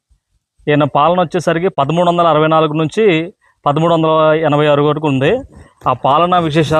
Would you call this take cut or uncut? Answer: uncut